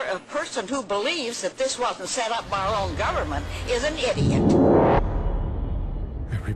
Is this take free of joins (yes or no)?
yes